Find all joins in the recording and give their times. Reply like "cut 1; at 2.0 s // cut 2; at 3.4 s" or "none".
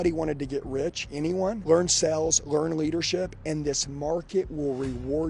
none